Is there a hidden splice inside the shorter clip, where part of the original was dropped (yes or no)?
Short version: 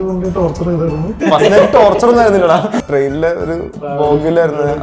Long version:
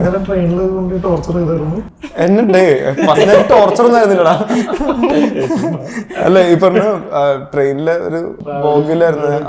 yes